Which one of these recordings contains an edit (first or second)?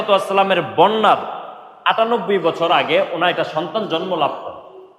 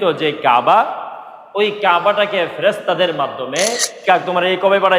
second